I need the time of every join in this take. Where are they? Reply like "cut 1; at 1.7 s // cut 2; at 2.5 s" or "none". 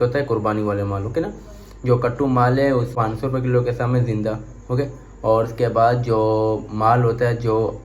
cut 1; at 2.9 s